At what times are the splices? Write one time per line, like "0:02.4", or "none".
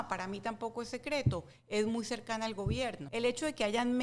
0:03.0